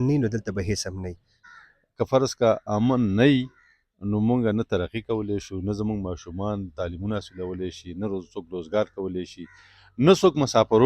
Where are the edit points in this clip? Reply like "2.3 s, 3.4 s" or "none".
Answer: 1.5 s